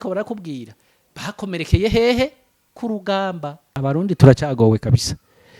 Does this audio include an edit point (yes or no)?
yes